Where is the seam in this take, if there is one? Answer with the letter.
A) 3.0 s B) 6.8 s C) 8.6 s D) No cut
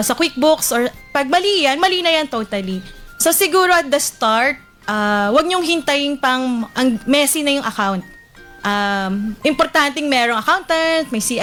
D